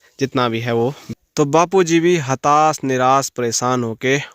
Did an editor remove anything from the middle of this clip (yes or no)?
yes